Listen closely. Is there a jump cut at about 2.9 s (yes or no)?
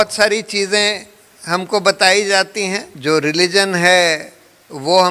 yes